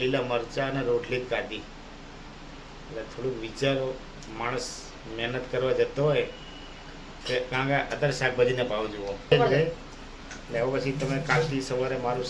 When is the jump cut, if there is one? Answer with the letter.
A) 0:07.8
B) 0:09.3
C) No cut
B